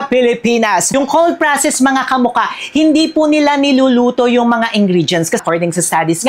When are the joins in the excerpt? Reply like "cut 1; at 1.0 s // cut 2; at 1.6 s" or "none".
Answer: cut 1; at 0.9 s // cut 2; at 5.4 s